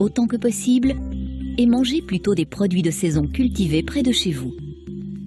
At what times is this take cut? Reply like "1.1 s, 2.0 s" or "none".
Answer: none